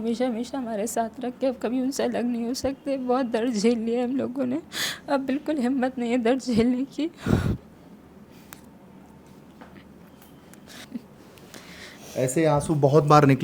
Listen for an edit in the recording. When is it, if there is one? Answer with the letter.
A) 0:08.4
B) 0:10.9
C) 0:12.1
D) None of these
D